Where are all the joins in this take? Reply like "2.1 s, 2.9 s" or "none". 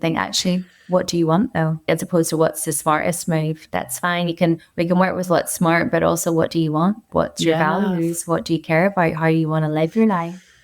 1.8 s, 7.1 s